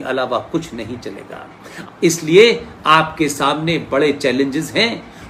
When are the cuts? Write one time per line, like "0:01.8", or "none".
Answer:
0:01.7